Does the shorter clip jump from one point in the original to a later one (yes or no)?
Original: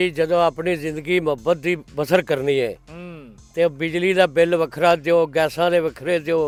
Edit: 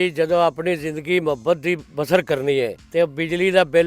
yes